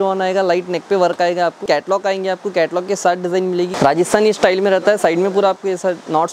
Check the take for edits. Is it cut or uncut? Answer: cut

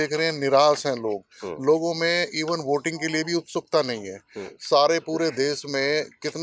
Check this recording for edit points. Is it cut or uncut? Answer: uncut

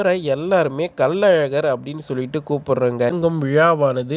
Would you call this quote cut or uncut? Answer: cut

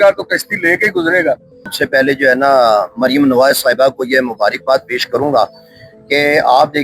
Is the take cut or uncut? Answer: cut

